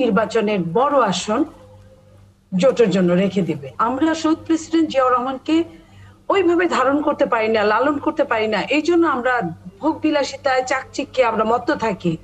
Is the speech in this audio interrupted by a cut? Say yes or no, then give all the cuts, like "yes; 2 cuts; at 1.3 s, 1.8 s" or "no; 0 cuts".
yes; 1 cut; at 3.7 s